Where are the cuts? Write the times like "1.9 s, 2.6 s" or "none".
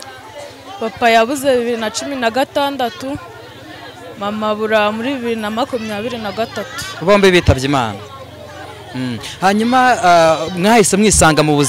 none